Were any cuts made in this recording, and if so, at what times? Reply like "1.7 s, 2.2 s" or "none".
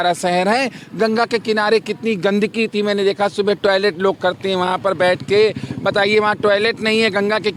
none